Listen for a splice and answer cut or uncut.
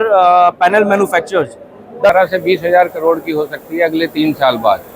cut